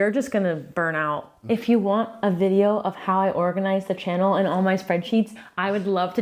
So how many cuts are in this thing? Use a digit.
1